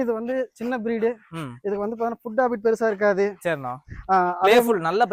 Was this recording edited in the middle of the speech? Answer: no; 0 cuts

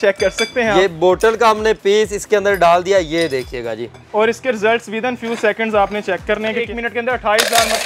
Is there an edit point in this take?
yes; 1 cut; at 6.6 s

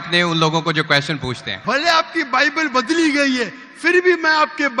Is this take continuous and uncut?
no; 1 cut; at 1.5 s

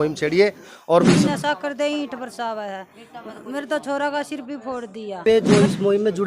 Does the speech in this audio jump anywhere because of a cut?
yes; 2 cuts; at 1.2 s, 5.2 s

